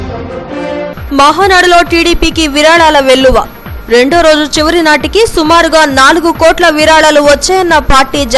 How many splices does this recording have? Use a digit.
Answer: 1